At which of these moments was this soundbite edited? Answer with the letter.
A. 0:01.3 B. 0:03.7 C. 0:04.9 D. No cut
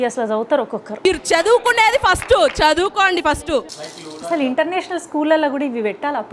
B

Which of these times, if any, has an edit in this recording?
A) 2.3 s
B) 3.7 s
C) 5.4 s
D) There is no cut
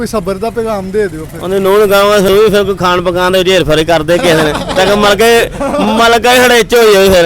A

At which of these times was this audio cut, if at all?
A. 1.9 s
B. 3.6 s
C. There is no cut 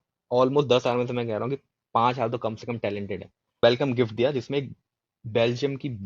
B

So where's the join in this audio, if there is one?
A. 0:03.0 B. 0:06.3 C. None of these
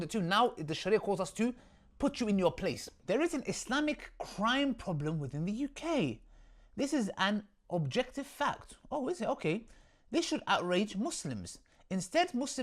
A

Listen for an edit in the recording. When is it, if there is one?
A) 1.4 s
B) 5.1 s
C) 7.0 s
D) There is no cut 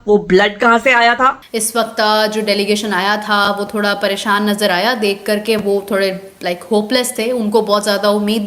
A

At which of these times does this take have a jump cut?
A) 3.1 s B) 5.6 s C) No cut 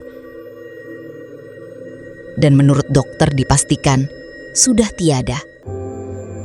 B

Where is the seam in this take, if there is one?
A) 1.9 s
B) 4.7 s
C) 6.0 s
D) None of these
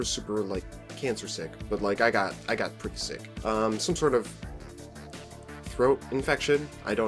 B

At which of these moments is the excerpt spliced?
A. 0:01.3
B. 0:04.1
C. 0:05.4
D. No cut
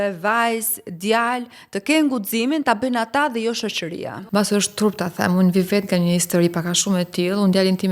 B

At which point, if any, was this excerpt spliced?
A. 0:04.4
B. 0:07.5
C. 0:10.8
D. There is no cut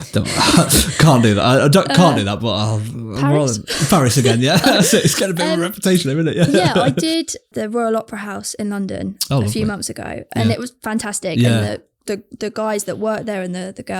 B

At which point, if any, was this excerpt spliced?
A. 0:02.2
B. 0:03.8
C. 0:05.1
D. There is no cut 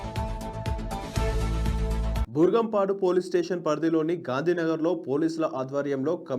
A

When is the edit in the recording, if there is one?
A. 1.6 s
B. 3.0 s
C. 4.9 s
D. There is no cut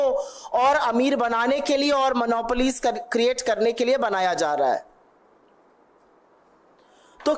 D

